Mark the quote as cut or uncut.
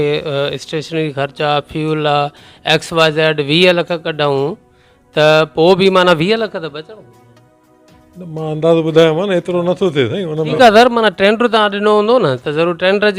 cut